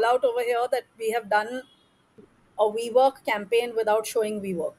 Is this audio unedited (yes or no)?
yes